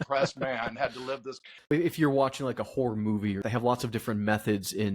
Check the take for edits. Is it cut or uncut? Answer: cut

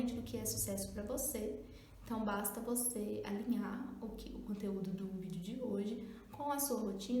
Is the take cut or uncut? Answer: uncut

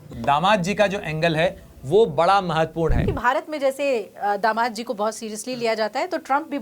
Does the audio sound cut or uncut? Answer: cut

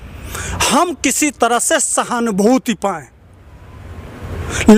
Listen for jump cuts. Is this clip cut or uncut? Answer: uncut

